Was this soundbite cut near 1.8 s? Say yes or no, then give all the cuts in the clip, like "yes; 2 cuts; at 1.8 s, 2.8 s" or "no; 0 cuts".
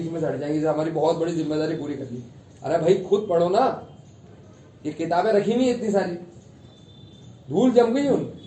no; 0 cuts